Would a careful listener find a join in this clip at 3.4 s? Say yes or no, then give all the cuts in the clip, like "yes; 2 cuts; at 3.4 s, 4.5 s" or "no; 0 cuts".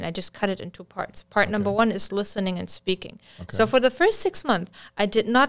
no; 0 cuts